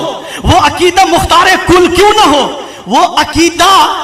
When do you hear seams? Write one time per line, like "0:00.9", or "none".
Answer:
none